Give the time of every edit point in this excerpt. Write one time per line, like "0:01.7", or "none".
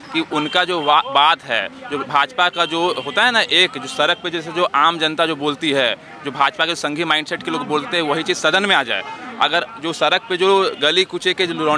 none